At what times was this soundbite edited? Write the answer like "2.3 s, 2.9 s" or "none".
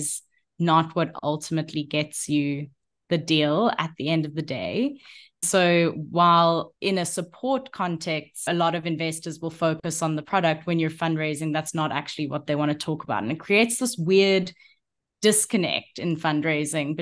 5.4 s, 6.7 s, 8.5 s

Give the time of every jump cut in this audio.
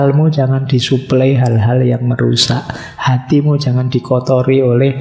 none

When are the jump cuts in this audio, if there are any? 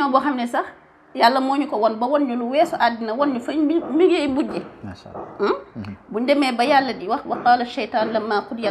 none

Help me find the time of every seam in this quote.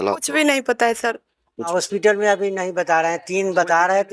1.7 s

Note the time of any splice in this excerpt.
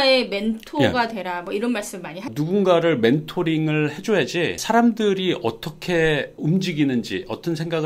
2.2 s

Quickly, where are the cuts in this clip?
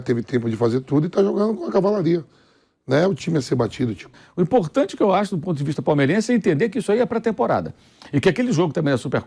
4.2 s

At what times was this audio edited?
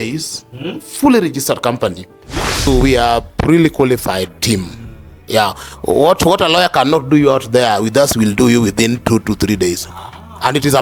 2.7 s

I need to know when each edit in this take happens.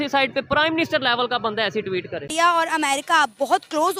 2.3 s

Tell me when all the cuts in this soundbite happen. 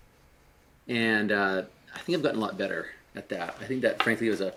none

